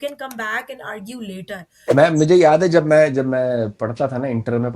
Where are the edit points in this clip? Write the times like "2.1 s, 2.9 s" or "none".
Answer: 1.8 s